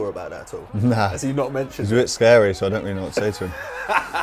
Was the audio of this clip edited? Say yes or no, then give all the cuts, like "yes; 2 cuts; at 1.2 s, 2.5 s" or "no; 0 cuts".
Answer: no; 0 cuts